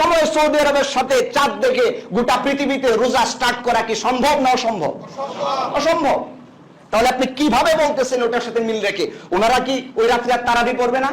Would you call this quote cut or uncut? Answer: uncut